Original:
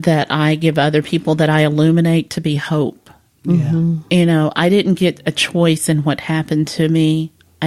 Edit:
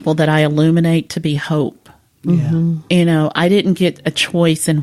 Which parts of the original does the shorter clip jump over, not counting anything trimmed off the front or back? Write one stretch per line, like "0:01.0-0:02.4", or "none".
none